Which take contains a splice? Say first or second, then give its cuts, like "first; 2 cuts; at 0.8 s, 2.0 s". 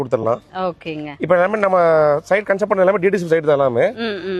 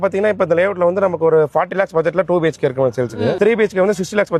second; 1 cut; at 3.4 s